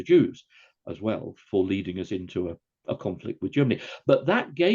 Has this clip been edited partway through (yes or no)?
yes